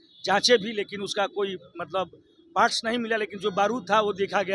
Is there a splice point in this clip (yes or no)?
no